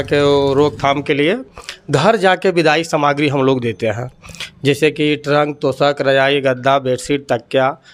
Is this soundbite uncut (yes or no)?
yes